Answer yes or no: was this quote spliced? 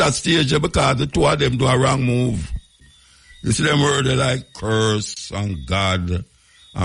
yes